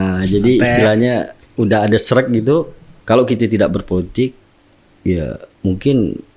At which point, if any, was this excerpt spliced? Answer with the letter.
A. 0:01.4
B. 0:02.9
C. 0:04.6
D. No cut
B